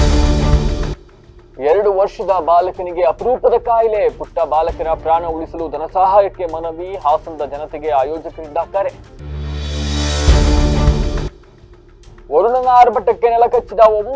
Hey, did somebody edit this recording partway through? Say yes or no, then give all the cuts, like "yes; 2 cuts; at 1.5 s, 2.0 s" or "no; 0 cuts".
no; 0 cuts